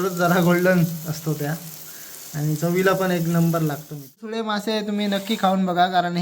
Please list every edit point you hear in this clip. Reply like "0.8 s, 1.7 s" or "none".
4.3 s